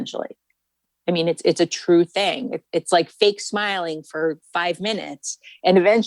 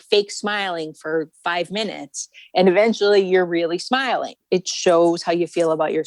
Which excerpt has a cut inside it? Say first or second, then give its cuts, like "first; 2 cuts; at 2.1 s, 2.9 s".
second; 1 cut; at 4.4 s